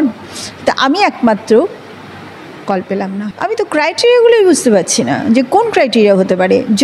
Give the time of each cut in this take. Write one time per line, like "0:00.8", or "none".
0:03.3

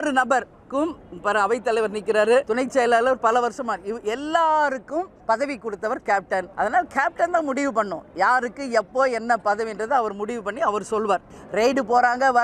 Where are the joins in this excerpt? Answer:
0:02.5
0:05.1
0:06.5
0:11.4

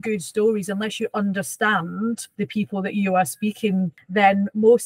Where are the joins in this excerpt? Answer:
0:02.3
0:04.0

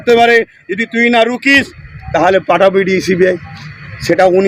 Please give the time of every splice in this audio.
none

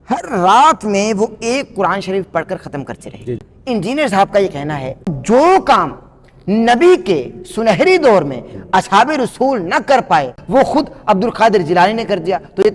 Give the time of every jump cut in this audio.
0:03.5
0:05.2
0:10.3

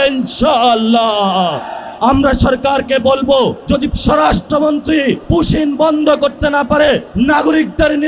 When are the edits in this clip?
0:01.8
0:03.8
0:05.2
0:07.1

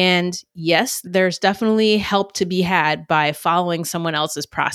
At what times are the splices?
0:01.0

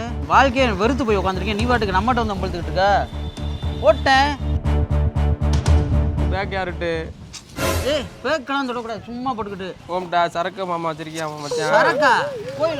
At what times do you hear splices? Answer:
none

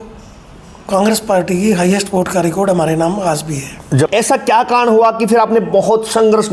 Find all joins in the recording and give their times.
0:04.1

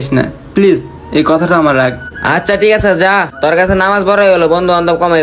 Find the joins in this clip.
none

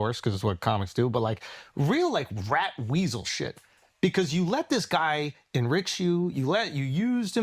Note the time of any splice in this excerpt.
none

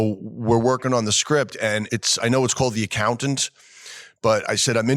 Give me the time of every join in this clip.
0:01.9

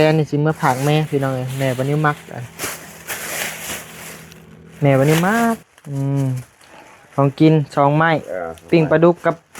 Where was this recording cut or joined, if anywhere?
0:05.6

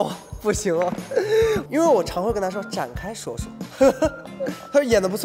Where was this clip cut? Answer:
0:01.7

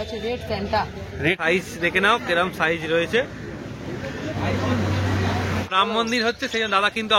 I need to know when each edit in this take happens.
0:01.4
0:05.7

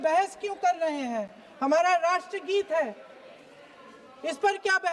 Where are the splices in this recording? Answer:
none

